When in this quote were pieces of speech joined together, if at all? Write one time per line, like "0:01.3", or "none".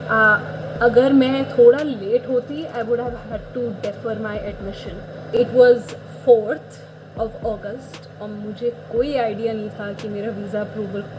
0:05.3